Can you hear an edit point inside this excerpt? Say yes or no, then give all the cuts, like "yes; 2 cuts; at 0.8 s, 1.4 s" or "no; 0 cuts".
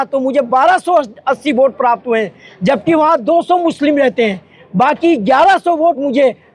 no; 0 cuts